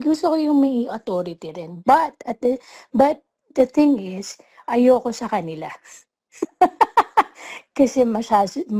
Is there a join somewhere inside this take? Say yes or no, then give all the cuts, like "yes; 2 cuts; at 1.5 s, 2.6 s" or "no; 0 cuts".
no; 0 cuts